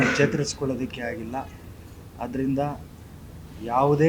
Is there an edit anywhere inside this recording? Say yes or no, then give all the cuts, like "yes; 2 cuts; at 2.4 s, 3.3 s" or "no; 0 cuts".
no; 0 cuts